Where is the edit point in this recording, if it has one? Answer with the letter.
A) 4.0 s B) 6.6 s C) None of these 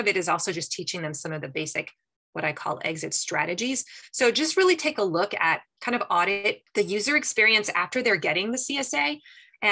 B